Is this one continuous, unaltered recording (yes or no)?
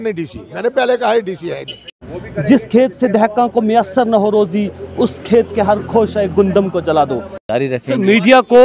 no